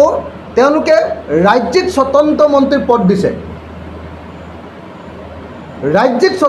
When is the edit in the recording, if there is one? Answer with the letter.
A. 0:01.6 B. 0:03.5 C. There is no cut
C